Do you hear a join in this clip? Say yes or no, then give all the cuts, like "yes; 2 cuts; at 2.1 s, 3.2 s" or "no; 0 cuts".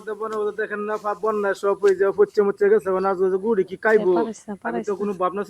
no; 0 cuts